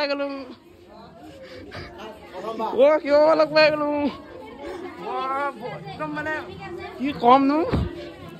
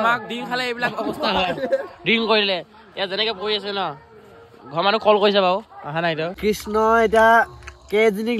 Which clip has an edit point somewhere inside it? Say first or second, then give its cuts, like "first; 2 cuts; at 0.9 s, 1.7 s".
second; 1 cut; at 6.3 s